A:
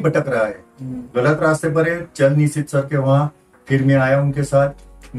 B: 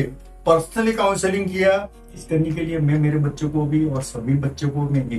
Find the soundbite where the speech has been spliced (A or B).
B